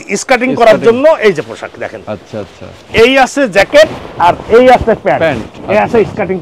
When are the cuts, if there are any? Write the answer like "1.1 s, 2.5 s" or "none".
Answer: 5.5 s